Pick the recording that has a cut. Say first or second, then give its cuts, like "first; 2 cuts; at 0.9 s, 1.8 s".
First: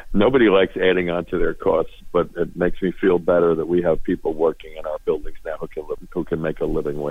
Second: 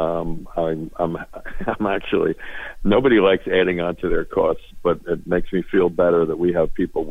first; 1 cut; at 6.0 s